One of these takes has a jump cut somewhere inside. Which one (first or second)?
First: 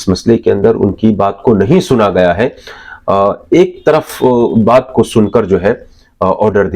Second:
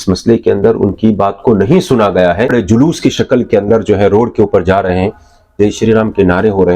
second